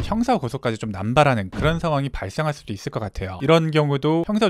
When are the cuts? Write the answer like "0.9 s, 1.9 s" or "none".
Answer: 3.4 s

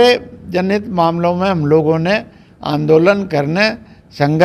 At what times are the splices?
none

